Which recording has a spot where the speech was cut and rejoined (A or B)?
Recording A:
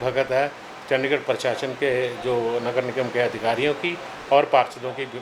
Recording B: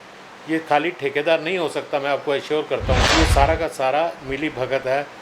B